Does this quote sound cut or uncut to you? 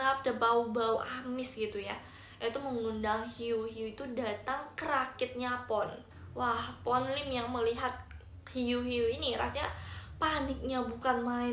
uncut